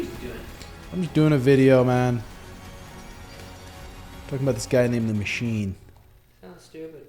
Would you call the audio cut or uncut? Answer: uncut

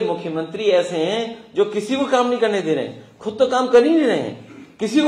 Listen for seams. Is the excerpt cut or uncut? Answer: uncut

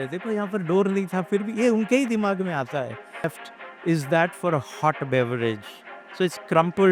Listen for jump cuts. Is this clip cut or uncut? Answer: cut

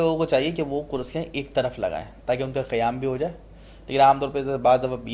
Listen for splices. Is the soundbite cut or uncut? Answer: uncut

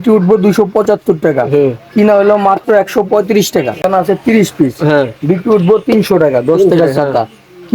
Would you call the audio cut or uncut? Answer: cut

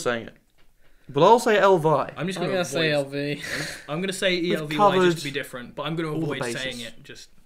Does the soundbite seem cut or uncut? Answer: uncut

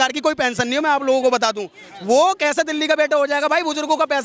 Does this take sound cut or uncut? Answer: uncut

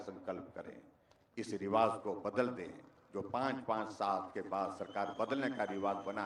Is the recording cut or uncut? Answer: uncut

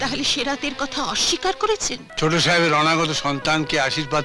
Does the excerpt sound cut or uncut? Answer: cut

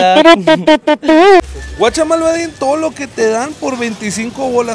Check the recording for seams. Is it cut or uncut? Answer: cut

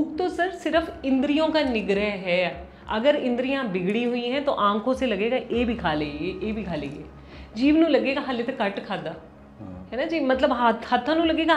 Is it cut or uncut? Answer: uncut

